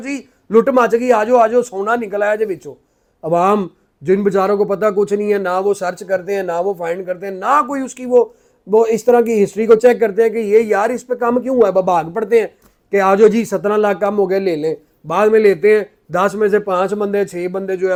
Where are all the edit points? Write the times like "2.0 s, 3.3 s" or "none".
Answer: none